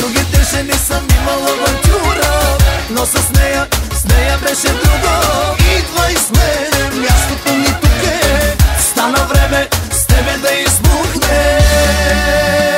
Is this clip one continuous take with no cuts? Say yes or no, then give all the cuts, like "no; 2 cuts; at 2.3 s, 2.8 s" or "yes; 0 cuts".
yes; 0 cuts